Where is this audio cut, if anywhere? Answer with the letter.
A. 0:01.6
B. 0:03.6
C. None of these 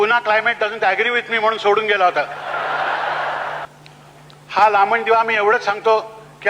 B